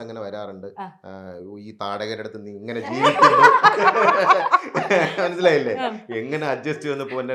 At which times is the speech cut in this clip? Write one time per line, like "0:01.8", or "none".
none